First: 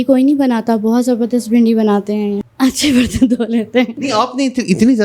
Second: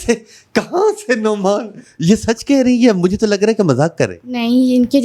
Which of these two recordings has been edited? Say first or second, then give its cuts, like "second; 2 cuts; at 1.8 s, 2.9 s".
first; 2 cuts; at 2.4 s, 4.0 s